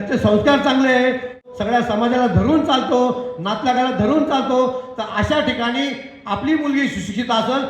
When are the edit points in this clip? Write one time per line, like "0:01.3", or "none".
0:01.4